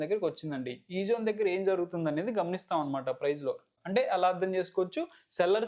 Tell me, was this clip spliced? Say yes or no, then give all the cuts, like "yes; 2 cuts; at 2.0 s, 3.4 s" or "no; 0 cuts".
yes; 1 cut; at 3.7 s